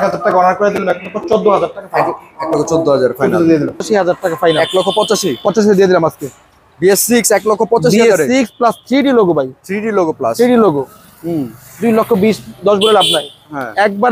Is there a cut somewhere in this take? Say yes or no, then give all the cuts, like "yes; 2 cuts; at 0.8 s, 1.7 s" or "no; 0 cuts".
yes; 1 cut; at 3.8 s